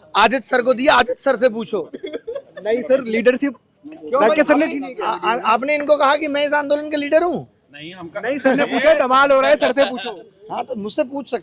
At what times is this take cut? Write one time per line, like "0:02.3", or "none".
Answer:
none